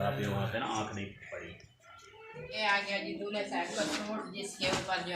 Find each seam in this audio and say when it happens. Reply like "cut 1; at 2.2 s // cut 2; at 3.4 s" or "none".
cut 1; at 2.6 s